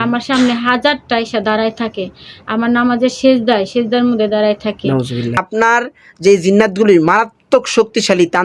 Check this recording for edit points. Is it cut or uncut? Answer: cut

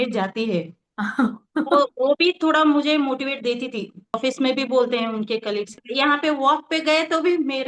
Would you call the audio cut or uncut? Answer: cut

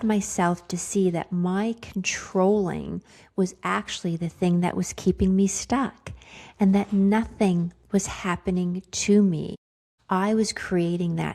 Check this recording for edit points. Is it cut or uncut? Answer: uncut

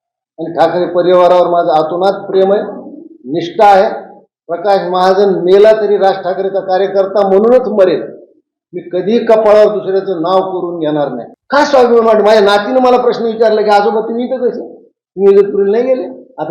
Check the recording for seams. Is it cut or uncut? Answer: cut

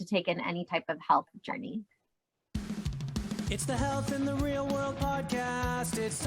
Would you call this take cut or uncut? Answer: cut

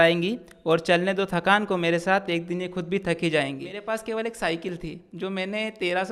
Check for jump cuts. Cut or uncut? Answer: cut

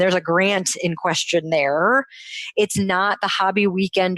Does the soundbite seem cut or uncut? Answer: uncut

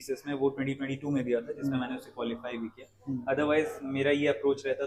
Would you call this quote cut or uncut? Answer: uncut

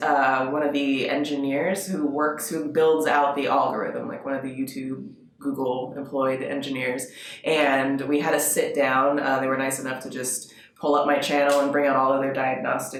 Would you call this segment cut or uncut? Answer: uncut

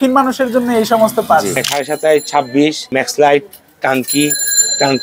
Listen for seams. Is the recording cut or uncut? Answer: cut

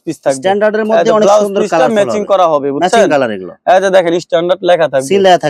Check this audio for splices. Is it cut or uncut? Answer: uncut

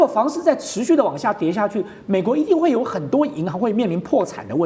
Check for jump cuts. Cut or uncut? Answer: uncut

